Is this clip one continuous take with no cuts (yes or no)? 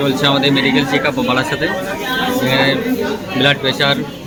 yes